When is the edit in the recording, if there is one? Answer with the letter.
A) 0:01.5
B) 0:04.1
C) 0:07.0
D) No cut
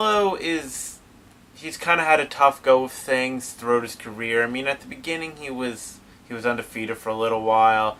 D